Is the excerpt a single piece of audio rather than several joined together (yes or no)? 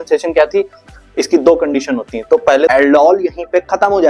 no